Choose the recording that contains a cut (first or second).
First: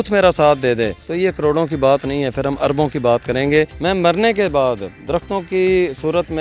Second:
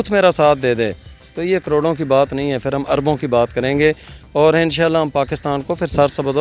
first